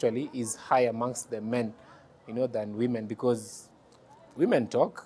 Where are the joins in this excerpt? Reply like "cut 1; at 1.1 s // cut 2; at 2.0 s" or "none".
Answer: none